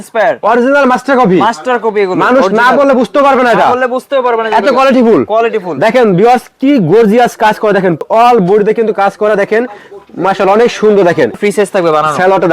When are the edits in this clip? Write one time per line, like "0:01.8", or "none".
0:08.0
0:11.4